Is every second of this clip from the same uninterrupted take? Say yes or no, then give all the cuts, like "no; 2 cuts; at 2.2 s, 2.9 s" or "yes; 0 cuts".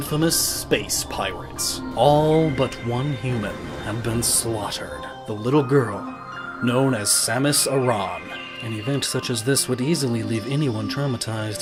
yes; 0 cuts